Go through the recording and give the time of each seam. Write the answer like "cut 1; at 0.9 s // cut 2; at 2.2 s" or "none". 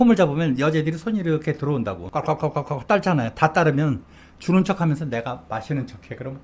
cut 1; at 2.0 s